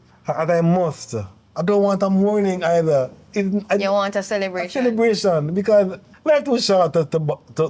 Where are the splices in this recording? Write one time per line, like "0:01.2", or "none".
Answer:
0:06.1